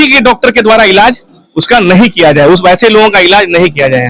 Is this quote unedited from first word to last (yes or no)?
yes